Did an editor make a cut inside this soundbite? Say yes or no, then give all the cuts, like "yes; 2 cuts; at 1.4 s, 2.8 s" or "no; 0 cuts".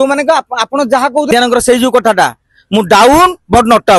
yes; 1 cut; at 1.3 s